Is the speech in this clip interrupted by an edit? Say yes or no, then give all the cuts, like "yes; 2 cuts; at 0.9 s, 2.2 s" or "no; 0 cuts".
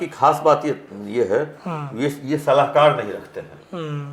no; 0 cuts